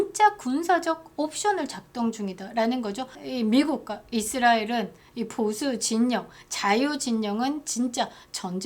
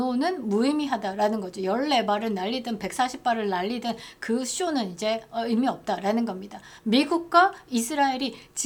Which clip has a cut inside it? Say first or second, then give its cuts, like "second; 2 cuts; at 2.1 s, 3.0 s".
first; 1 cut; at 3.2 s